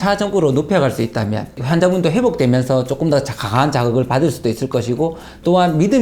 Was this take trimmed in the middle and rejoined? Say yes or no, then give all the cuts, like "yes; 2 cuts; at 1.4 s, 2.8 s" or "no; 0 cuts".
yes; 1 cut; at 1.6 s